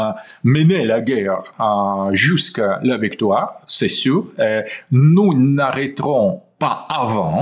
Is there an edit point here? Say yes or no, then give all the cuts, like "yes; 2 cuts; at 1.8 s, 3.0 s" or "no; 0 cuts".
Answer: no; 0 cuts